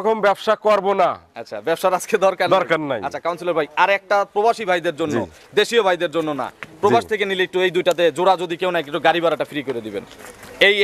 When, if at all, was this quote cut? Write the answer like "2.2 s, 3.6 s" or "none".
none